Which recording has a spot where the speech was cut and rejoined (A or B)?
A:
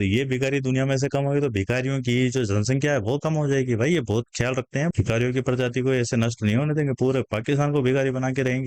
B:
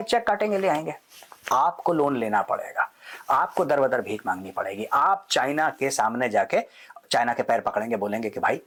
A